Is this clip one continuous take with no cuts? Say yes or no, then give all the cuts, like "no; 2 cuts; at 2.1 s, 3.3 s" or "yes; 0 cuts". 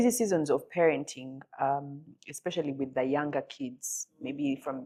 yes; 0 cuts